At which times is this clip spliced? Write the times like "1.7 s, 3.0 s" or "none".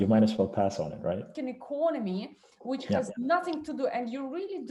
1.3 s